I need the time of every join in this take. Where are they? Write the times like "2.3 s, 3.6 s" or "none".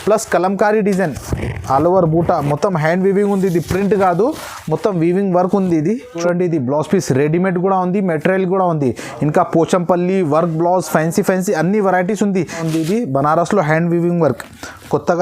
6.1 s, 12.6 s